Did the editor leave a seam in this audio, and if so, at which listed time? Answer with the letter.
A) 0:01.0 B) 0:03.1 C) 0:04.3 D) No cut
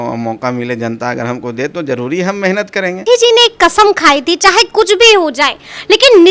B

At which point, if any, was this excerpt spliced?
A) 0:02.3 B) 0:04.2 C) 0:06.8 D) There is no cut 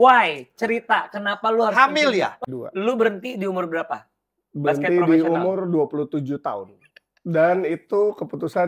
A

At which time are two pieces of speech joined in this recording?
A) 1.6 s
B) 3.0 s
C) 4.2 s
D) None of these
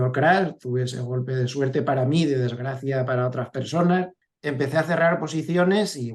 C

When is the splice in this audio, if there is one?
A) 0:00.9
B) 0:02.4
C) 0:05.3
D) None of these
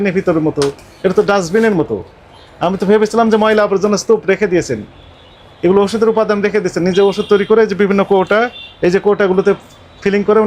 D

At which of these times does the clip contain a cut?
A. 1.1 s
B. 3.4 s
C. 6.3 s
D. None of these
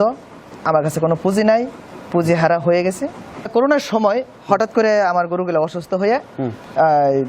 B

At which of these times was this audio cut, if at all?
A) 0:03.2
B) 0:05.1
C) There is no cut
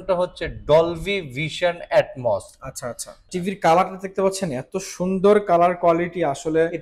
A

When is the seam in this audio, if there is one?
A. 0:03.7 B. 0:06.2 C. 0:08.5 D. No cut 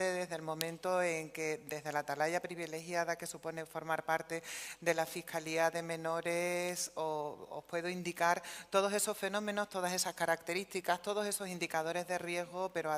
B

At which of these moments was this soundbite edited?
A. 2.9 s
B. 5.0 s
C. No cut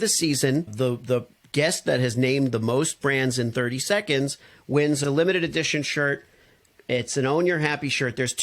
B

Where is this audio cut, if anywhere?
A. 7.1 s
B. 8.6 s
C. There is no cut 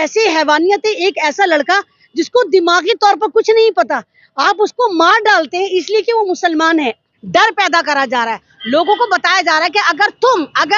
A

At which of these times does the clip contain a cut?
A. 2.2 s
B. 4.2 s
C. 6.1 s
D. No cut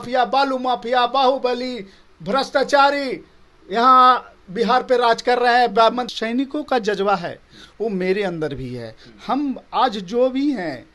C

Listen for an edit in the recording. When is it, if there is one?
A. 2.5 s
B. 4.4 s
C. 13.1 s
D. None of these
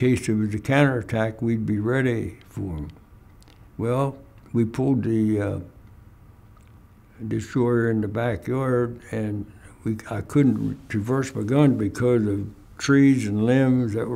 B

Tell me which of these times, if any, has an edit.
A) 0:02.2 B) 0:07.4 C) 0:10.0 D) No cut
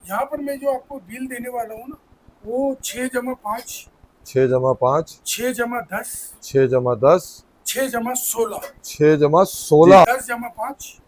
C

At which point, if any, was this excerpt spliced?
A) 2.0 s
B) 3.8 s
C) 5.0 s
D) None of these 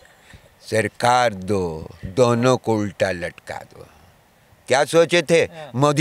D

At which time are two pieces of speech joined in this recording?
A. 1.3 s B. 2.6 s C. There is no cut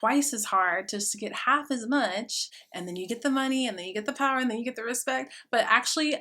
B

